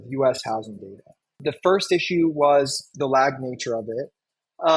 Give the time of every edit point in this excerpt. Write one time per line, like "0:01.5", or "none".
0:01.3